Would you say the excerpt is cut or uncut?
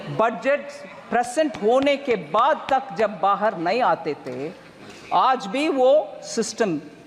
uncut